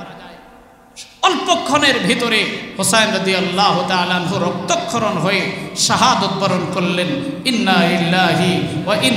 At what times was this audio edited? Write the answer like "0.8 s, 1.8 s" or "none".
none